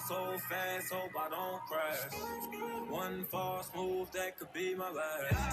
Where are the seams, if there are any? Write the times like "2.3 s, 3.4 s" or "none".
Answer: none